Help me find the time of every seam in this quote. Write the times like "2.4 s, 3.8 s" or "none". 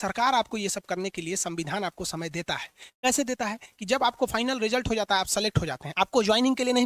none